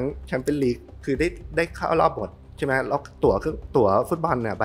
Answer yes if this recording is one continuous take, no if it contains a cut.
yes